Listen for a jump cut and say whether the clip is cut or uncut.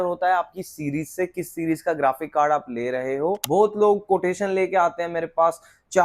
cut